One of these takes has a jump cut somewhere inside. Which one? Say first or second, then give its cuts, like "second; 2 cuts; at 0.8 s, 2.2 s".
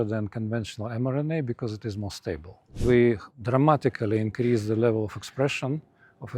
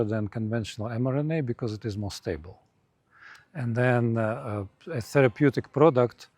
first; 2 cuts; at 2.8 s, 3.3 s